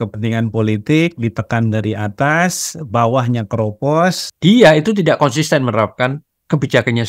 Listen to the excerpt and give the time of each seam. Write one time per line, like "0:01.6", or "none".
0:04.3